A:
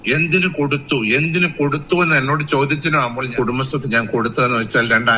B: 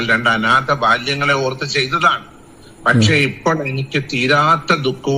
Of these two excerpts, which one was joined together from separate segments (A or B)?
A